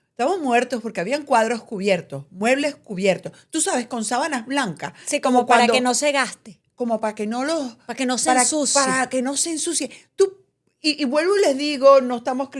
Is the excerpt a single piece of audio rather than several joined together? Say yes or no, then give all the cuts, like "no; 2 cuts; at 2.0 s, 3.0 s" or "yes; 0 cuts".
yes; 0 cuts